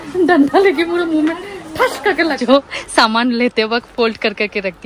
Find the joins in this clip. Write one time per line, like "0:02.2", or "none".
0:02.4